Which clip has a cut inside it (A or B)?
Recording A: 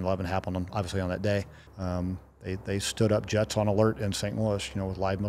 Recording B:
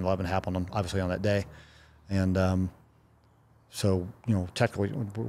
A